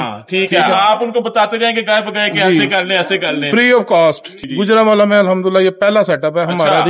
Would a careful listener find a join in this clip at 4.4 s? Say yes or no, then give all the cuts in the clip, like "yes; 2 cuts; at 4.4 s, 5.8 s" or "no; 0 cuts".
yes; 1 cut; at 4.4 s